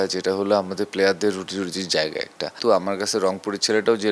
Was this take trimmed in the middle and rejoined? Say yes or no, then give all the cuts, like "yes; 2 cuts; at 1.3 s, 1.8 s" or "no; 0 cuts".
yes; 1 cut; at 2.6 s